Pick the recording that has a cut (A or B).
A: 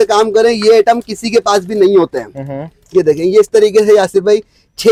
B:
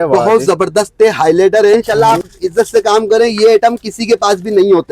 B